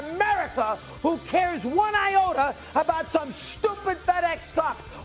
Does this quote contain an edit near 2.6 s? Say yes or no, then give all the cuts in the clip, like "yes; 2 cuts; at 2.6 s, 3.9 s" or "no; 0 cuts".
no; 0 cuts